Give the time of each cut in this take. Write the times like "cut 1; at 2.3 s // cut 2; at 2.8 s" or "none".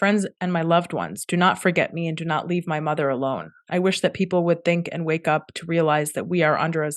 none